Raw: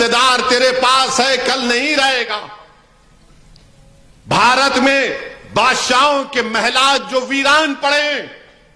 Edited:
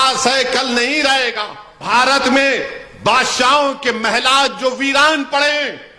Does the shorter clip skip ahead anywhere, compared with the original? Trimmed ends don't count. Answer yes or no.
yes